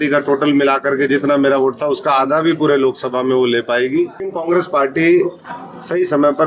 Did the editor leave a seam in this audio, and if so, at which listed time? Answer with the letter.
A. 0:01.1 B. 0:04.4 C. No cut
B